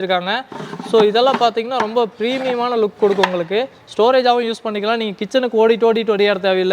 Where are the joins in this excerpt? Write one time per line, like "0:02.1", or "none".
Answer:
none